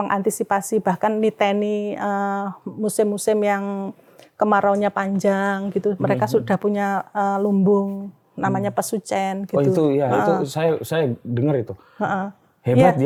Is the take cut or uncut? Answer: uncut